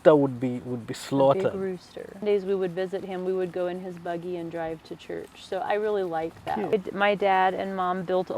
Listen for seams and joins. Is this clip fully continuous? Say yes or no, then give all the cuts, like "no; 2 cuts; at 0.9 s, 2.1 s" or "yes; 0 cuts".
no; 2 cuts; at 2.2 s, 6.7 s